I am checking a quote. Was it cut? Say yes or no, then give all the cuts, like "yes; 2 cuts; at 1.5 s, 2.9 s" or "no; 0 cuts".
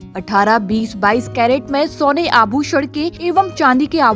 yes; 1 cut; at 3.1 s